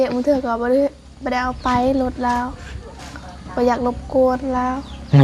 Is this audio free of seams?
yes; 0 cuts

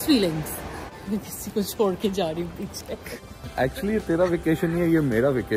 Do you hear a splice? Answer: yes; 2 cuts; at 1.0 s, 3.1 s

